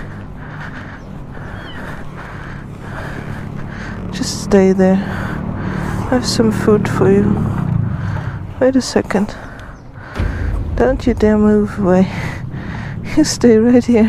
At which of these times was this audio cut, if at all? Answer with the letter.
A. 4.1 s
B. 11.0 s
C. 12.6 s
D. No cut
D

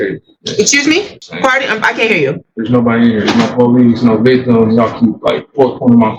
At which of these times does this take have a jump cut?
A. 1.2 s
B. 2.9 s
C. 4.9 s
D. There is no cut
D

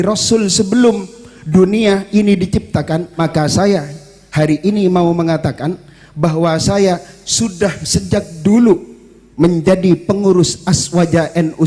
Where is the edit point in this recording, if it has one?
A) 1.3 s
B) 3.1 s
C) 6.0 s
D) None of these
B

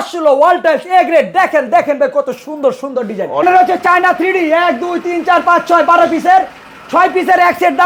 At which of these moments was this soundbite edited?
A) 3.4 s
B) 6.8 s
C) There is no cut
A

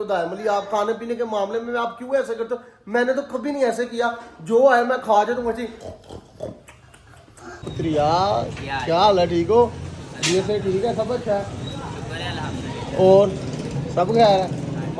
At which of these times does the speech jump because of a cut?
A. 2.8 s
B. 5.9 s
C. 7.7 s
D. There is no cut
C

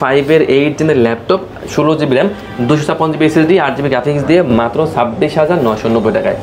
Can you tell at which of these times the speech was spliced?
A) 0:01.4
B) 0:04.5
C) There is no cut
C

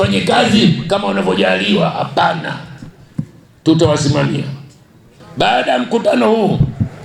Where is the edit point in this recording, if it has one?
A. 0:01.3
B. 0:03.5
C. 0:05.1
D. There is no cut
C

